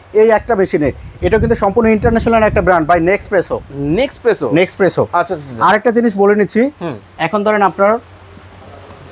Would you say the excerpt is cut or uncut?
uncut